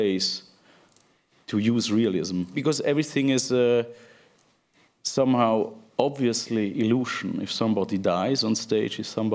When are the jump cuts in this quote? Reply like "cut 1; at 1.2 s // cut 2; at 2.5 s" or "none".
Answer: cut 1; at 2.5 s